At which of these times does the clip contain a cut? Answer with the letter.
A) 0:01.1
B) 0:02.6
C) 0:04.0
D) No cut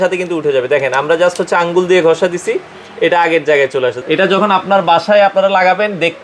C